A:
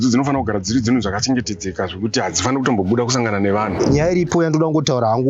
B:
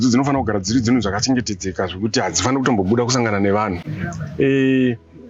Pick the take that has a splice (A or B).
A